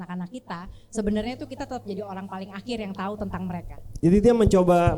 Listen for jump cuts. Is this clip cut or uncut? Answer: cut